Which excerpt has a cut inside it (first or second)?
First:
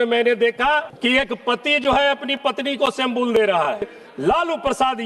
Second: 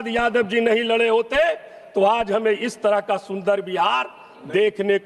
first